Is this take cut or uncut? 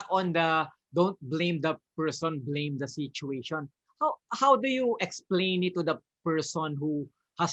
uncut